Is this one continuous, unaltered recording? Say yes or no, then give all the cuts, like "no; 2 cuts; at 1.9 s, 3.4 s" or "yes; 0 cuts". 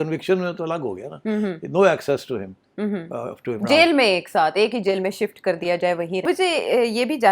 no; 1 cut; at 6.2 s